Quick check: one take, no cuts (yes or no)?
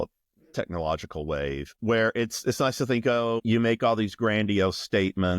no